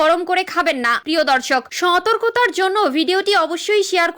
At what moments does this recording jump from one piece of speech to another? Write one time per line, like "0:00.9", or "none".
0:01.0